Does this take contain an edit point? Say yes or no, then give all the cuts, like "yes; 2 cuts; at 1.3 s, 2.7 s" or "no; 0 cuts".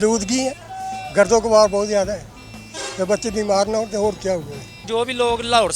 yes; 1 cut; at 4.8 s